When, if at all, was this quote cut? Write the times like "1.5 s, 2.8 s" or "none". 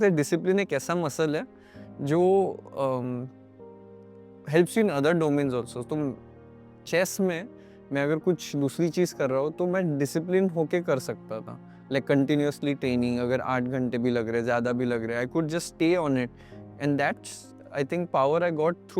none